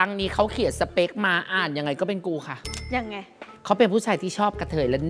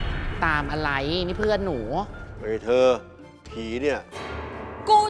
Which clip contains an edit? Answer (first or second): first